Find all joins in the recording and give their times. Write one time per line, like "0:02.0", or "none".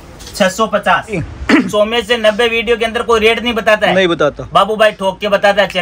0:01.3

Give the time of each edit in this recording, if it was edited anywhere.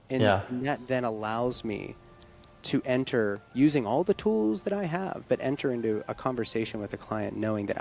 none

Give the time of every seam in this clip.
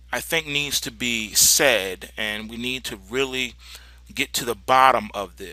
0:02.4

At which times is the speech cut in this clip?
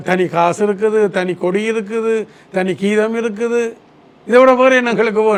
none

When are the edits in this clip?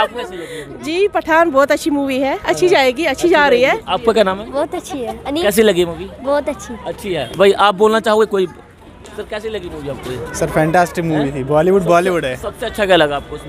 none

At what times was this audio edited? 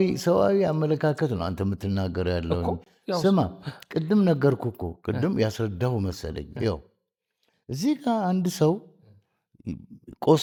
none

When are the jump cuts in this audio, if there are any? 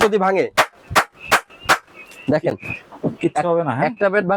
none

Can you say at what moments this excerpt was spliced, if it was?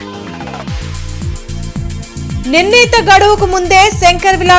0:01.5

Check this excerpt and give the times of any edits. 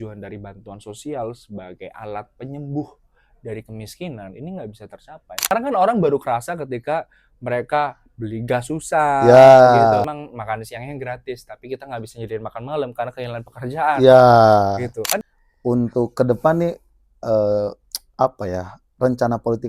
0:05.5
0:10.0
0:15.2

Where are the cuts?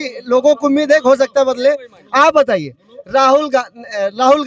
none

